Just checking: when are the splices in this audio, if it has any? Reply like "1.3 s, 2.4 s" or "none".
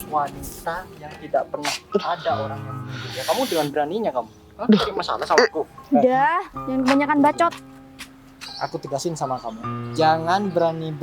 5.7 s